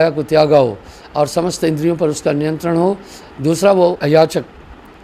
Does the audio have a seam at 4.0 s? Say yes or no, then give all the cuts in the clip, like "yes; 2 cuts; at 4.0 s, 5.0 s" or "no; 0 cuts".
yes; 1 cut; at 4.0 s